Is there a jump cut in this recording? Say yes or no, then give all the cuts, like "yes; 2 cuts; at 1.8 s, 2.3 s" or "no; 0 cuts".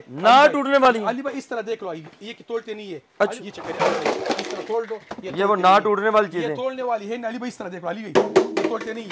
yes; 1 cut; at 3.3 s